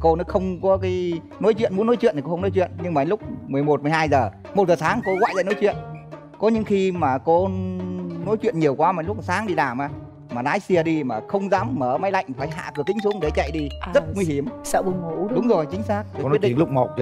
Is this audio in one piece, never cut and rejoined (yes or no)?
yes